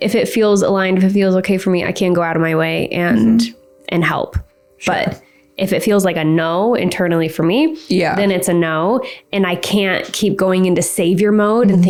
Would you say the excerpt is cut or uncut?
uncut